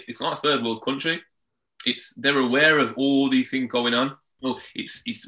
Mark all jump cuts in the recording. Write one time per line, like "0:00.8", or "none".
0:04.3